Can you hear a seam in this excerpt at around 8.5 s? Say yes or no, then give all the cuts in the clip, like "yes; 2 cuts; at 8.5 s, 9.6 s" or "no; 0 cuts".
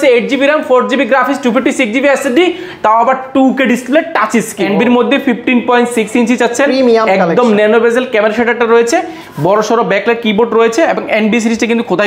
no; 1 cut; at 4.5 s